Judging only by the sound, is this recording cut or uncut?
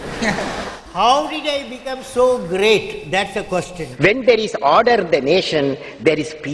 cut